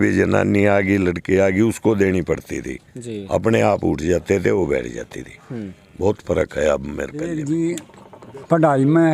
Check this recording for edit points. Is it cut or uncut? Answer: cut